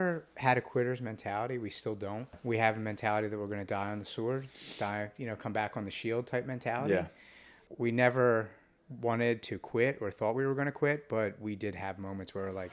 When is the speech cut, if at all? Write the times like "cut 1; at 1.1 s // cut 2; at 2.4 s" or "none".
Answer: cut 1; at 2.4 s // cut 2; at 7.6 s